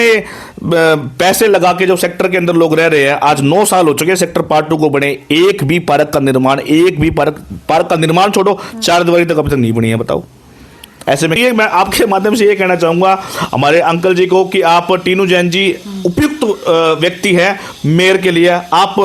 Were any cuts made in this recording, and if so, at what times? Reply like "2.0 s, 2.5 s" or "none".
11.4 s